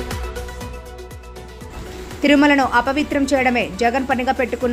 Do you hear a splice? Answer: yes; 1 cut; at 1.7 s

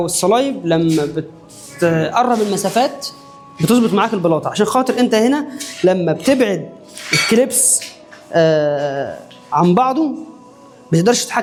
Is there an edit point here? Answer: no; 0 cuts

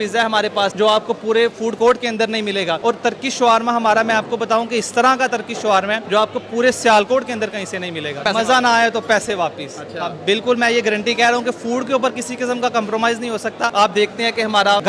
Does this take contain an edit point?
yes; 3 cuts; at 2.8 s, 8.2 s, 13.7 s

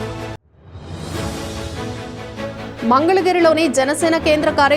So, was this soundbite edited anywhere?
yes; 1 cut; at 2.7 s

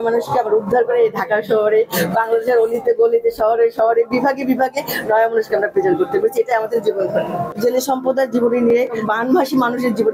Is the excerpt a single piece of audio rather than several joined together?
no; 1 cut; at 7.5 s

